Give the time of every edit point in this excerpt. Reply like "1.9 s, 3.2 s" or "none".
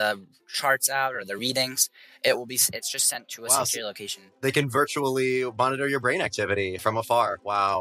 6.8 s